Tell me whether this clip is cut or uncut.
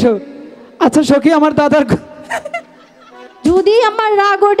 cut